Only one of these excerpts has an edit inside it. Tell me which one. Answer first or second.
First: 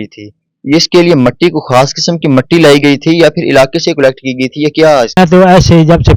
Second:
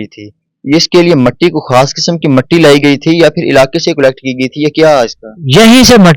first